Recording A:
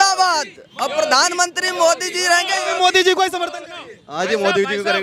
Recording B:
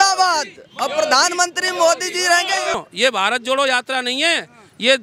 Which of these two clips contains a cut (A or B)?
B